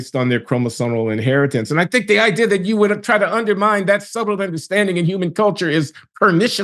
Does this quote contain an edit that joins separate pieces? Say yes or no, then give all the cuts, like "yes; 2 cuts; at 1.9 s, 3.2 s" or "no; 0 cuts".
no; 0 cuts